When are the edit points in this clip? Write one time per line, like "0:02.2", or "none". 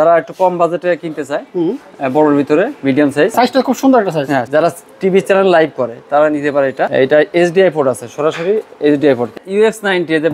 0:03.3
0:04.5
0:06.9
0:09.3